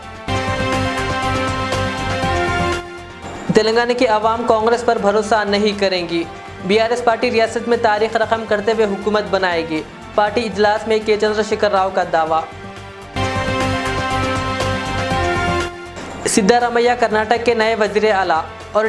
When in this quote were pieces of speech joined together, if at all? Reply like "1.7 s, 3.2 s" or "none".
none